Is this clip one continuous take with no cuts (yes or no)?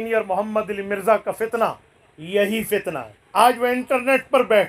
no